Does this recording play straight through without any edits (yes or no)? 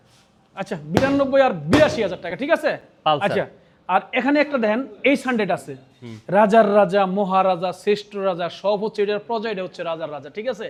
yes